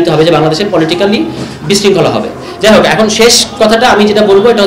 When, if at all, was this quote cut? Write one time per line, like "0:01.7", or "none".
none